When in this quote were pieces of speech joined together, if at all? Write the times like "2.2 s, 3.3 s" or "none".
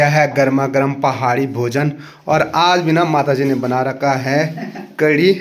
none